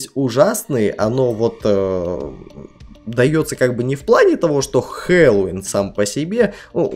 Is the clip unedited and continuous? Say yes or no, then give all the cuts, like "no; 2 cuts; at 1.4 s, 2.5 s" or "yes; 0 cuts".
yes; 0 cuts